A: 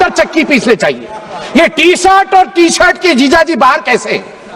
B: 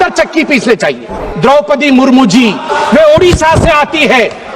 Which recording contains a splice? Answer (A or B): B